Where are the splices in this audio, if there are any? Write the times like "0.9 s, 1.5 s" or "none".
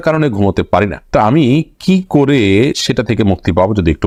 none